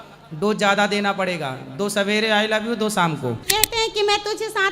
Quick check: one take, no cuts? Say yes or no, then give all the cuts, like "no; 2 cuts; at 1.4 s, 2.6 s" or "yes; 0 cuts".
no; 1 cut; at 3.4 s